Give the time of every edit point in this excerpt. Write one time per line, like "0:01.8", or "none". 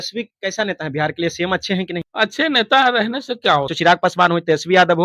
0:02.1
0:03.7